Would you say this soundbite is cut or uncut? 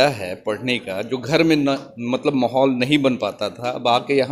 uncut